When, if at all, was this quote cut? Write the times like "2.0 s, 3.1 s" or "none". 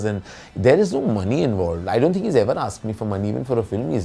none